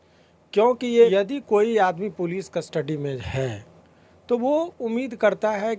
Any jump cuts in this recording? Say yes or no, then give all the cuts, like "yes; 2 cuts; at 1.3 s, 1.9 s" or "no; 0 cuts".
yes; 1 cut; at 1.1 s